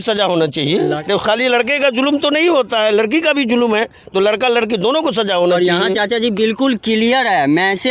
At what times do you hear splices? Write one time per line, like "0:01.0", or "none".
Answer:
0:01.0